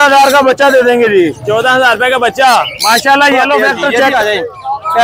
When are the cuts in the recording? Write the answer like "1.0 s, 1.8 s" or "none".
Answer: 4.1 s